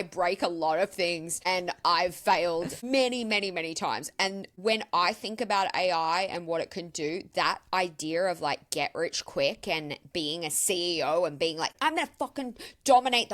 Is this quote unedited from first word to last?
no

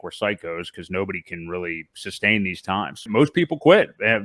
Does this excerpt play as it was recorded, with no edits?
no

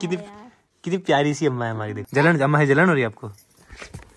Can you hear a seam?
no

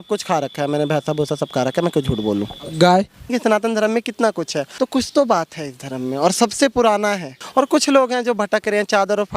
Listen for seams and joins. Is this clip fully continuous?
no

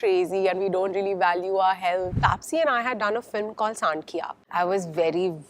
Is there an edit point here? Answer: yes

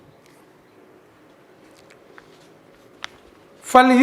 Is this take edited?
no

